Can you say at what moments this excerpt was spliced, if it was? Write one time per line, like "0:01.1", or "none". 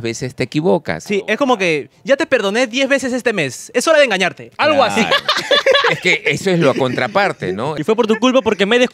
0:01.0
0:07.8